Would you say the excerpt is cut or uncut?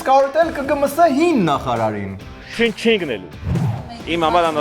cut